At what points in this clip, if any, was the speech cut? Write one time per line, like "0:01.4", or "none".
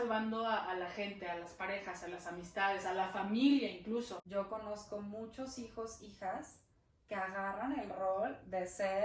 0:04.2